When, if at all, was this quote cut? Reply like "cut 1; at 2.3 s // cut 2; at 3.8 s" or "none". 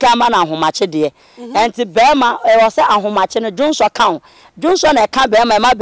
none